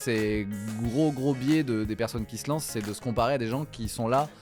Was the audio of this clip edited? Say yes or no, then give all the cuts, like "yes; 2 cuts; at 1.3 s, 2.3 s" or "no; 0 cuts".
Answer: no; 0 cuts